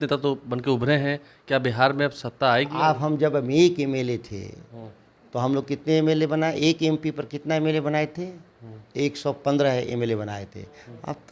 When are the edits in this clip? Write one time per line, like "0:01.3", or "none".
none

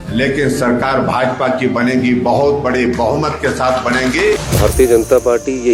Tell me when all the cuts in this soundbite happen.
0:04.5

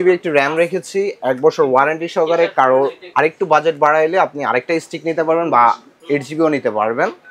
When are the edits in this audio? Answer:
none

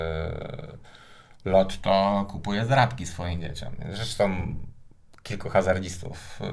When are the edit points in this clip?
none

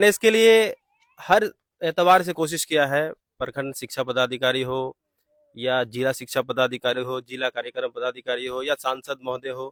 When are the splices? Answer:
none

